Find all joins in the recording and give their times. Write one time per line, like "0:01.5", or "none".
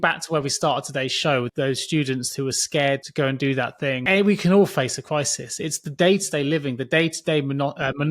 0:01.5
0:03.1
0:04.0